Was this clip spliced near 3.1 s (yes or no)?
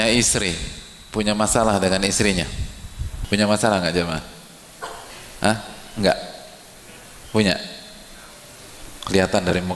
yes